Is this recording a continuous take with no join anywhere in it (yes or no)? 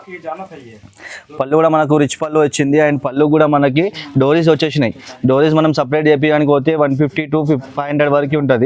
yes